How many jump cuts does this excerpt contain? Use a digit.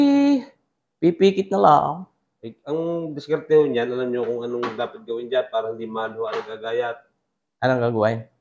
0